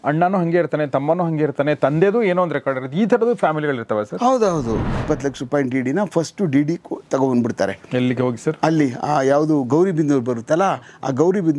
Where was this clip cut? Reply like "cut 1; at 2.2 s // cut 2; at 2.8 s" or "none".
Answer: cut 1; at 4.9 s